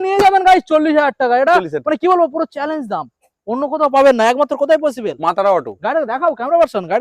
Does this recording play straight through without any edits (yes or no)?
yes